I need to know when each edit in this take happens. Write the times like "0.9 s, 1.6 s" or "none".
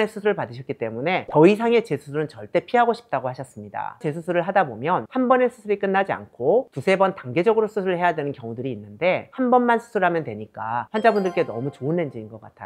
4.0 s, 9.3 s